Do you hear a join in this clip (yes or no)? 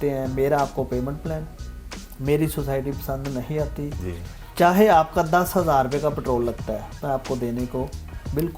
no